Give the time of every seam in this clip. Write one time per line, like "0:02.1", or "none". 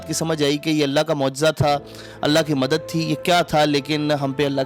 none